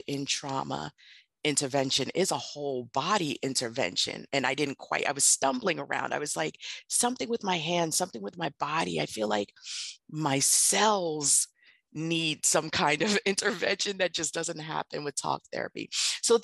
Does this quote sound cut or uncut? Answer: uncut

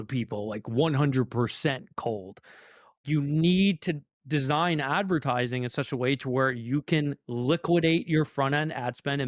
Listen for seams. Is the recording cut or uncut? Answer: cut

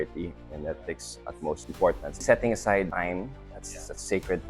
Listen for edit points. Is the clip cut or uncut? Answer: cut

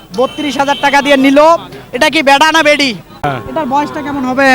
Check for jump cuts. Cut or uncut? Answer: cut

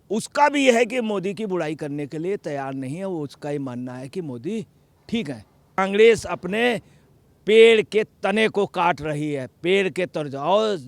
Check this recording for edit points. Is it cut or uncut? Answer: cut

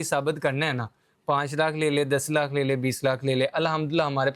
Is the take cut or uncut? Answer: uncut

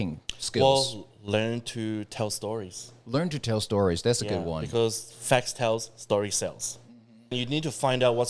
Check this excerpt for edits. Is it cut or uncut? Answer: cut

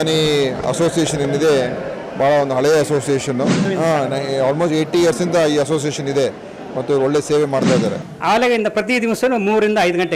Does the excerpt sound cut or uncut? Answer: cut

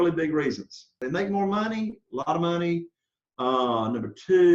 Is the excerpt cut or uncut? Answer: cut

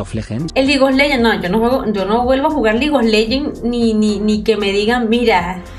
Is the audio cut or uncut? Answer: uncut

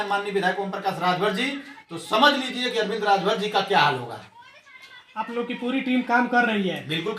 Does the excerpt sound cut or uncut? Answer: uncut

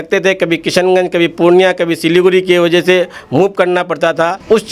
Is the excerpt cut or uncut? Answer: uncut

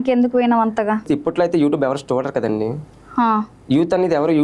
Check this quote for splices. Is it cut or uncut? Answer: cut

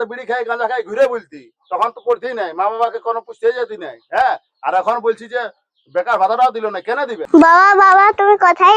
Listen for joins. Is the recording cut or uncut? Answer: cut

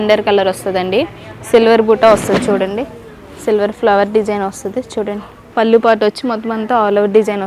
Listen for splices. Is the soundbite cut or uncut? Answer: uncut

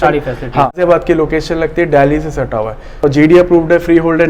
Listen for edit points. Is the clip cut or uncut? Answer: cut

